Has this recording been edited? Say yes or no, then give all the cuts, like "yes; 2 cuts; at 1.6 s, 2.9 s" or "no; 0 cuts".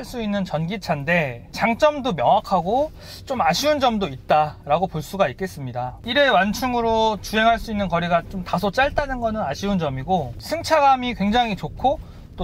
no; 0 cuts